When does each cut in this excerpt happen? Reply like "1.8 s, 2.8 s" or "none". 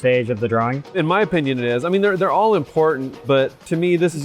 0.8 s, 3.1 s